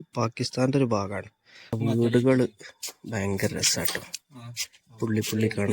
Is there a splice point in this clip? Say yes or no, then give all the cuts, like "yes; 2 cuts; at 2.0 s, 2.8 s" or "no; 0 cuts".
yes; 1 cut; at 1.8 s